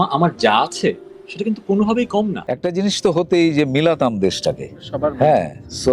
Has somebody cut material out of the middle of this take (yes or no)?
yes